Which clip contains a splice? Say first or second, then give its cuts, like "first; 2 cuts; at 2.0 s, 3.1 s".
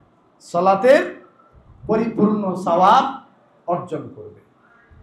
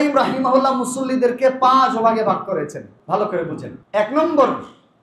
second; 2 cuts; at 2.9 s, 3.7 s